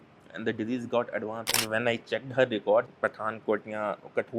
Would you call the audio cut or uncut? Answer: cut